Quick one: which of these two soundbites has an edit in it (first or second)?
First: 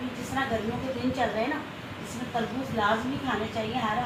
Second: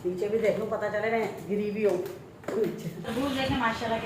second